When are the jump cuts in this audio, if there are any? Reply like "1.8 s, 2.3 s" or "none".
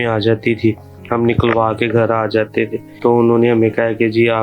2.8 s